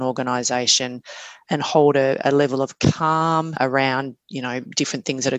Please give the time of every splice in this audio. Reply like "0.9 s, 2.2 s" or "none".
3.5 s